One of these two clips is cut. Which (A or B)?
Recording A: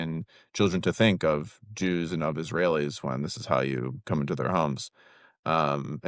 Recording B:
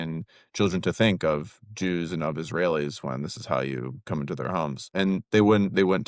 B